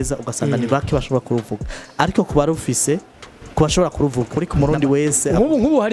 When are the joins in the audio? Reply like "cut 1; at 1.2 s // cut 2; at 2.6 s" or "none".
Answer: cut 1; at 4.3 s